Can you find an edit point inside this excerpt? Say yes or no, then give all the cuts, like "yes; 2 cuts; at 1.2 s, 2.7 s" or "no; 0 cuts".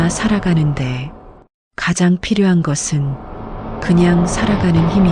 no; 0 cuts